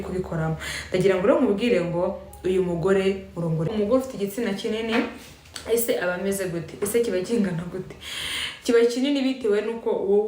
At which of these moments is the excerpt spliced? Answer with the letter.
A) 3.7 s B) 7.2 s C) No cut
A